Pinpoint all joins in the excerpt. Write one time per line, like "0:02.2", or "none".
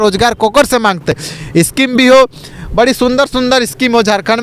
none